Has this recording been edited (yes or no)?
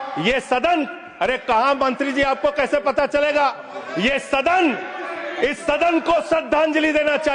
no